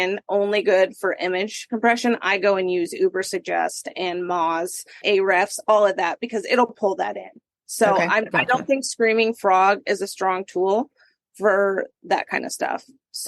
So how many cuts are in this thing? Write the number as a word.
two